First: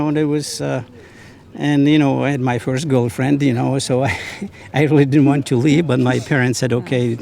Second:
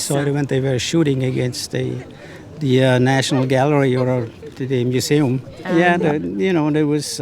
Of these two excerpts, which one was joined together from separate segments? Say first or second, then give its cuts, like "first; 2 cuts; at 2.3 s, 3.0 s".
second; 1 cut; at 5.5 s